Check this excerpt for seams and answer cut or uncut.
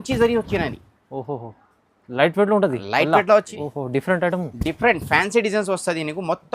cut